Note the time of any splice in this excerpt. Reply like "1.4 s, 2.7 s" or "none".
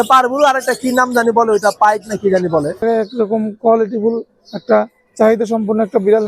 2.8 s